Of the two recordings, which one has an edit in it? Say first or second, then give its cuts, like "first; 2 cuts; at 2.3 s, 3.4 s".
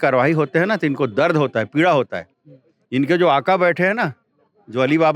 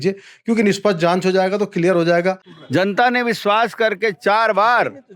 second; 1 cut; at 2.5 s